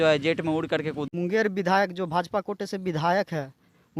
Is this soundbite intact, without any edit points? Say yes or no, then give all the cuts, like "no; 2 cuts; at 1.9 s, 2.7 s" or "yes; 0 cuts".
no; 1 cut; at 1.1 s